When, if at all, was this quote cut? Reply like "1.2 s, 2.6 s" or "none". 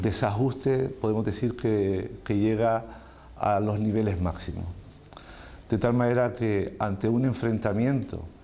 none